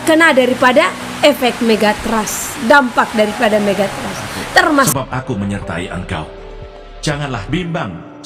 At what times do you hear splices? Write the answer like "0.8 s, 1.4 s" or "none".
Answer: 4.9 s